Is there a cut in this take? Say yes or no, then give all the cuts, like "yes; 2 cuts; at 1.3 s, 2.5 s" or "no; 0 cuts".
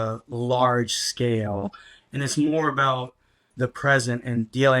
yes; 1 cut; at 3.5 s